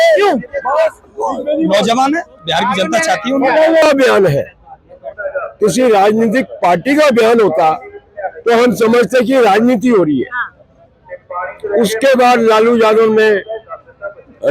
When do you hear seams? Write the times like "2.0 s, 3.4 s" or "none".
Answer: 3.8 s